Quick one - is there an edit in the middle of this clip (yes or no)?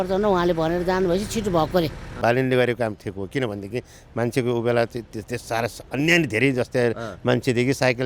yes